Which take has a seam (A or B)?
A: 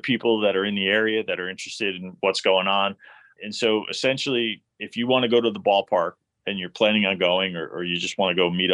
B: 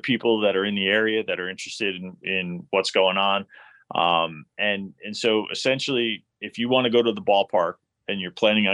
A